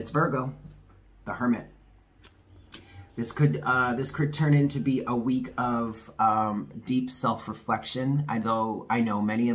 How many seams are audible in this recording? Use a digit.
0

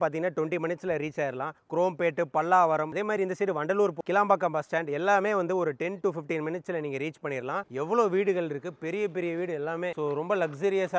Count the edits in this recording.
3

